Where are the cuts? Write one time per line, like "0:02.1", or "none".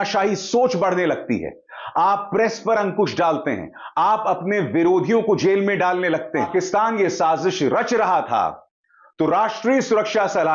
0:06.5